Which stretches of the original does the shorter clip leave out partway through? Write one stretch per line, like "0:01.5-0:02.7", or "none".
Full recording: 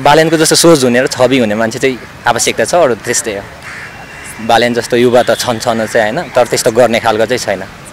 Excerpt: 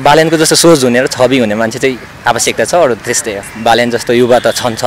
0:03.5-0:04.3